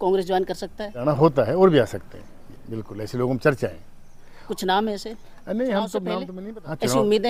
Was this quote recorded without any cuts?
no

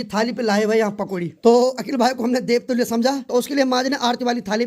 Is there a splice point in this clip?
yes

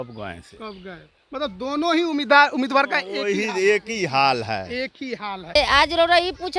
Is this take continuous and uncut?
no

